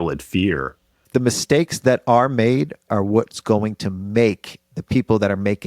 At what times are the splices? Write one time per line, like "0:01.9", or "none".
0:01.0
0:02.9